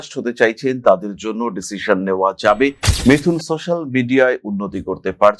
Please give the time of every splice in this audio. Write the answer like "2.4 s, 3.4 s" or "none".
2.9 s